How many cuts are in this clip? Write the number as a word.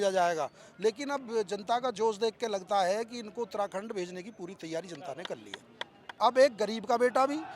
one